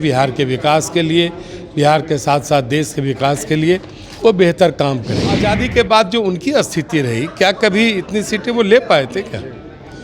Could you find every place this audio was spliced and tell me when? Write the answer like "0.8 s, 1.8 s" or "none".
5.4 s